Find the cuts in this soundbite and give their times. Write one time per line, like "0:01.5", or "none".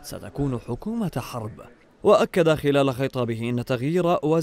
0:01.7